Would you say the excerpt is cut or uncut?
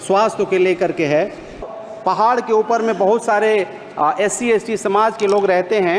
cut